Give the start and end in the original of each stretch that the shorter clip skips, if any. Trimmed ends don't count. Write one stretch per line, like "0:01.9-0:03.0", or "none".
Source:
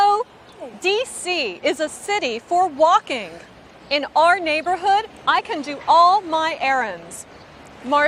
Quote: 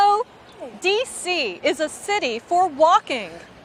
none